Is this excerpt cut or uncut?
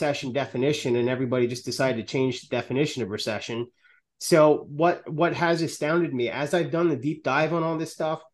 uncut